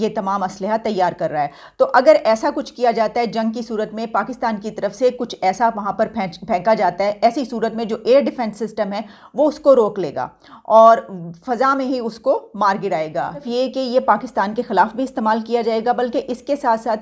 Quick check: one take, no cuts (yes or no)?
no